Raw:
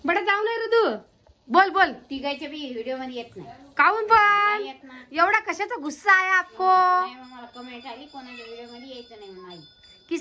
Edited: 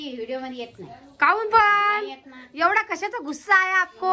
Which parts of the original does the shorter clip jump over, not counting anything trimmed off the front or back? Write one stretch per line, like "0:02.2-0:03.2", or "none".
none